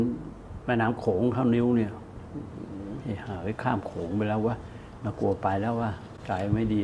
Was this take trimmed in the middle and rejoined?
no; 0 cuts

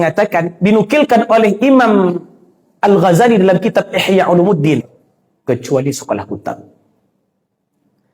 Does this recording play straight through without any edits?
no; 1 cut; at 5.0 s

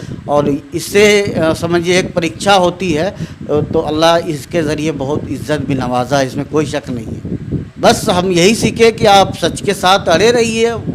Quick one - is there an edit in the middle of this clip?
yes; 1 cut; at 7.1 s

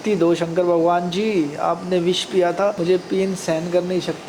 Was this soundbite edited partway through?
no; 0 cuts

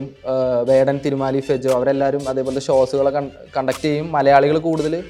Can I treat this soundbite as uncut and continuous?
yes; 0 cuts

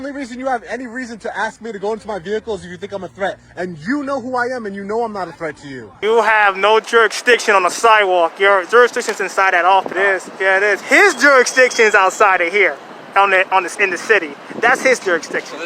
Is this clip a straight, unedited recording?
no; 2 cuts; at 5.9 s, 9.9 s

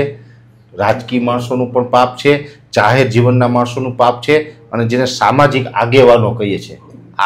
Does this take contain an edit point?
no; 0 cuts

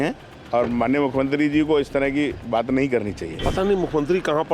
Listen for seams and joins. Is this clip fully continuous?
no; 1 cut; at 3.3 s

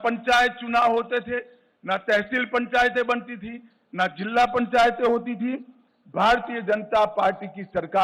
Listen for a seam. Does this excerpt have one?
no; 0 cuts

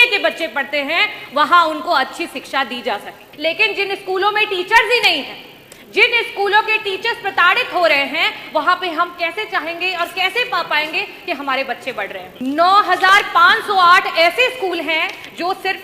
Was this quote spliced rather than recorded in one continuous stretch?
yes; 2 cuts; at 3.2 s, 12.3 s

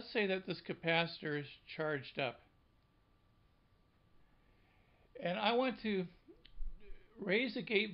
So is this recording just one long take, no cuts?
yes; 0 cuts

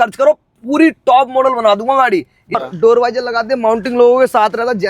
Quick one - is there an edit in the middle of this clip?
yes; 1 cut; at 2.6 s

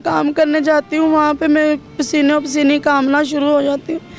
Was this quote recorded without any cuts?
yes; 0 cuts

